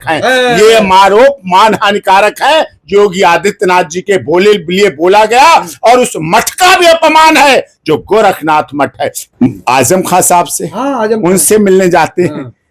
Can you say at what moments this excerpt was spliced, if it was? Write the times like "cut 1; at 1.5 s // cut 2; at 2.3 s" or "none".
cut 1; at 9.2 s